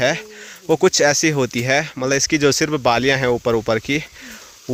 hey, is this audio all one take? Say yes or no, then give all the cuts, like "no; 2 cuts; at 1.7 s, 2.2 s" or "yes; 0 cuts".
yes; 0 cuts